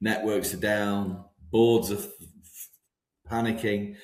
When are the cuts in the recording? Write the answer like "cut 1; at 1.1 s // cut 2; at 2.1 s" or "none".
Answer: none